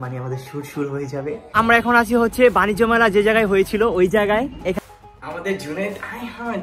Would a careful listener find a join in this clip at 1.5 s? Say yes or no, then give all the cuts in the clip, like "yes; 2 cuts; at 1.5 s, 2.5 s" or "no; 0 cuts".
yes; 2 cuts; at 1.5 s, 4.8 s